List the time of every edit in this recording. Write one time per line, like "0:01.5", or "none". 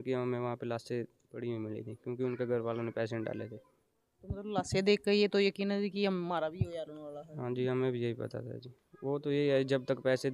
none

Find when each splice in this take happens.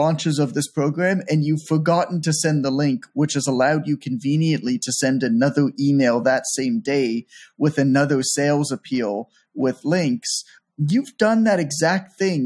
none

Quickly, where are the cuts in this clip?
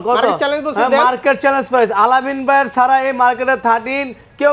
none

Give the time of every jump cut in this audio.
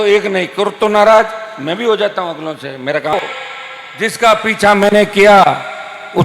0:03.1

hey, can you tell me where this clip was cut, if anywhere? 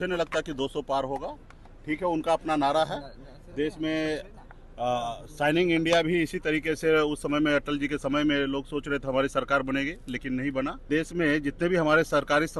0:10.9

